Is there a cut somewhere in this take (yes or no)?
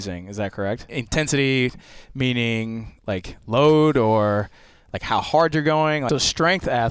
yes